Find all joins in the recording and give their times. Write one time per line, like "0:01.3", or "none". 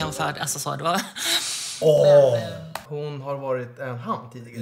0:02.8